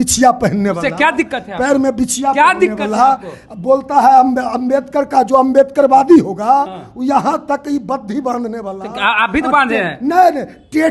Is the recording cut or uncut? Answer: uncut